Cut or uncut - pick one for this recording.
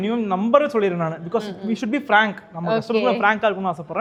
uncut